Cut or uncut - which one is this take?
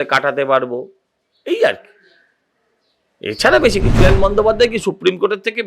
cut